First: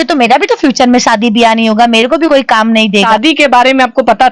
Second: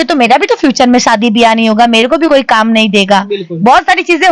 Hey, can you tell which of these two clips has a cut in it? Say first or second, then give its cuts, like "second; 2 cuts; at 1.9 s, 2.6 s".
first; 1 cut; at 3.0 s